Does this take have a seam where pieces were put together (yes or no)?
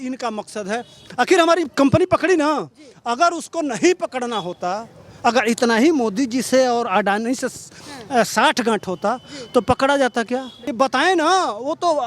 yes